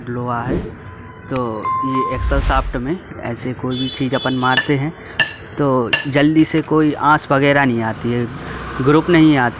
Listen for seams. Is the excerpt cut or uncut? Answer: uncut